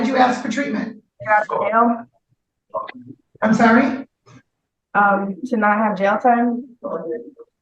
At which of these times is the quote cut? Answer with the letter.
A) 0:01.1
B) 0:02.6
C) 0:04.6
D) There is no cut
A